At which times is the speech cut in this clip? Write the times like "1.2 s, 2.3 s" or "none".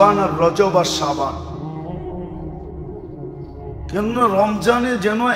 1.3 s, 3.9 s